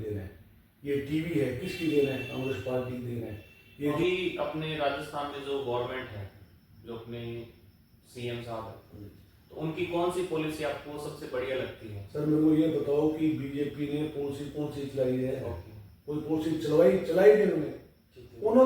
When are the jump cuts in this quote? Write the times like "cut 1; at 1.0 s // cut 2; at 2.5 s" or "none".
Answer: cut 1; at 4.0 s

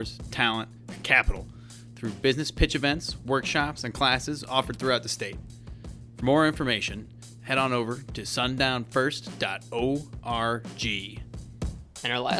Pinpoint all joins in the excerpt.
cut 1; at 11.2 s

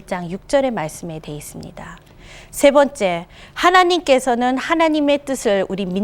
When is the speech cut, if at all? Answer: none

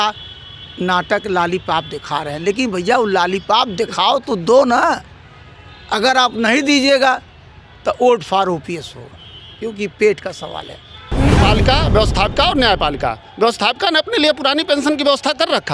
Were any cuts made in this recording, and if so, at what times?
cut 1; at 11.3 s

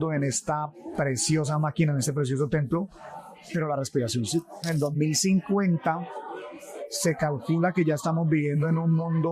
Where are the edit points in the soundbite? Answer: cut 1; at 4.7 s

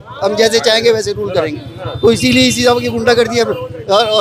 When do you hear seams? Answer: none

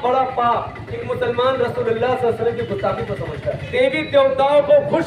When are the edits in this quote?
cut 1; at 1.1 s // cut 2; at 3.7 s

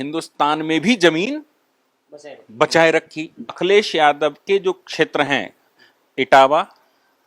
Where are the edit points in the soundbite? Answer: cut 1; at 3.5 s

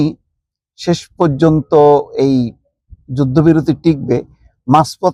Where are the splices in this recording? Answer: none

